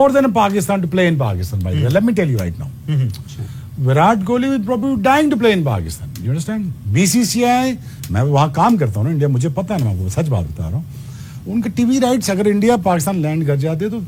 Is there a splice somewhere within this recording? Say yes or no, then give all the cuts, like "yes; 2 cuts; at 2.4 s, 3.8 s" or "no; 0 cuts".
no; 0 cuts